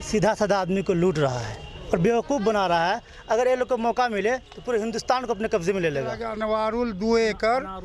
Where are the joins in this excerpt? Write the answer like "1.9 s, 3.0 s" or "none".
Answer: 6.3 s